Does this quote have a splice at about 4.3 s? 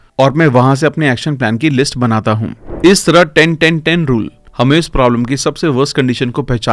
no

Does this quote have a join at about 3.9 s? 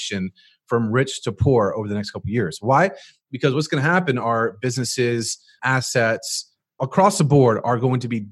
no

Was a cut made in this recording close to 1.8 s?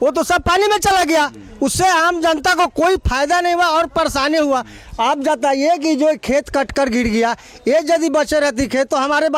no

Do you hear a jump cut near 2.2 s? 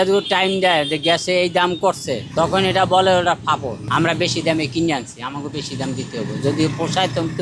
yes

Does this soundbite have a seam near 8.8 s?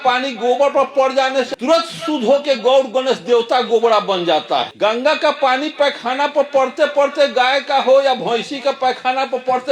no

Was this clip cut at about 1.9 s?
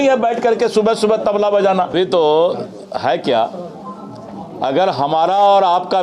yes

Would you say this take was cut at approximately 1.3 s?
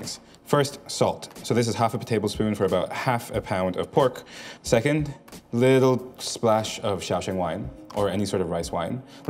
no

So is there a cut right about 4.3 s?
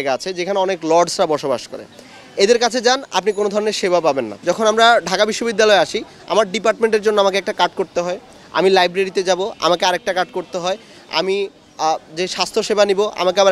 yes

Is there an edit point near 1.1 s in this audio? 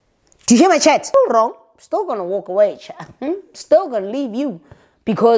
yes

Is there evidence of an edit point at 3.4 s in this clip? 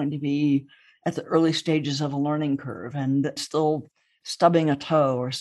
yes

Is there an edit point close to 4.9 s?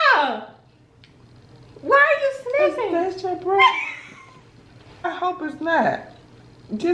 yes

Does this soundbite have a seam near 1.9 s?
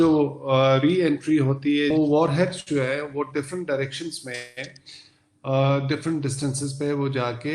yes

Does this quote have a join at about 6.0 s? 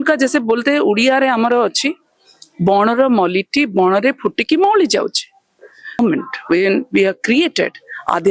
yes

